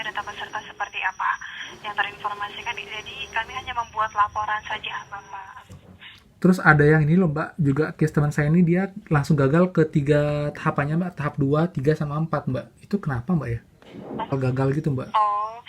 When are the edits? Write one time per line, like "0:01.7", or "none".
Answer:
0:05.5
0:14.3